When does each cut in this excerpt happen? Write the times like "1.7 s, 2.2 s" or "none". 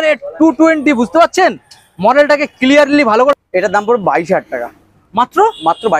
3.3 s